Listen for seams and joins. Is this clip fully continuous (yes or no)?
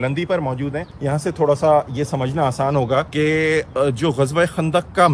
no